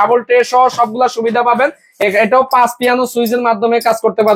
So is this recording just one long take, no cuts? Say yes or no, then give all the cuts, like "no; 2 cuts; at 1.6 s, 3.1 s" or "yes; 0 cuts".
yes; 0 cuts